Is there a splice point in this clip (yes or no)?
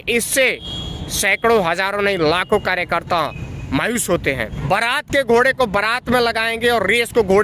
yes